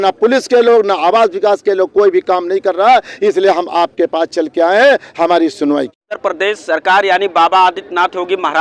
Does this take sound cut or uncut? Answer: cut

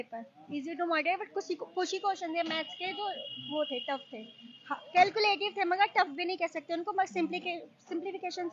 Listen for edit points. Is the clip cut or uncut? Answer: uncut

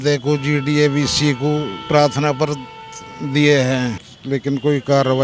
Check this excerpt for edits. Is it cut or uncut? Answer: cut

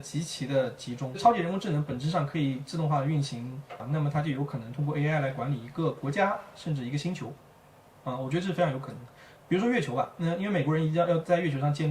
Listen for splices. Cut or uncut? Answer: cut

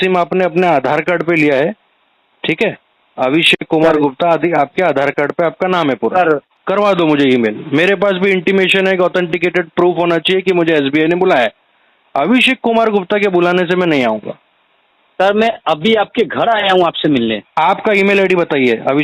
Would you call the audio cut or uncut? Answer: cut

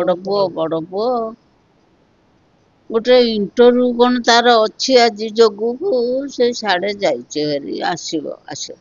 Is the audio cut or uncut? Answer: uncut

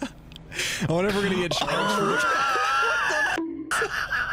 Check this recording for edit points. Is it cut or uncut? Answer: uncut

